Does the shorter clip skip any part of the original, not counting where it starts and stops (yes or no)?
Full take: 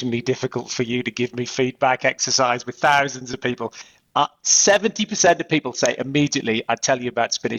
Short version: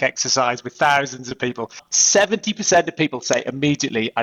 yes